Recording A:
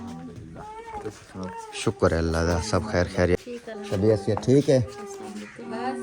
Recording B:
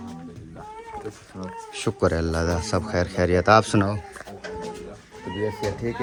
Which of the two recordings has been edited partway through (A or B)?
A